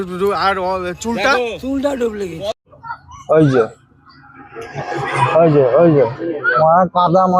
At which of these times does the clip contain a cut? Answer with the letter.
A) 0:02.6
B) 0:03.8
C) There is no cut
A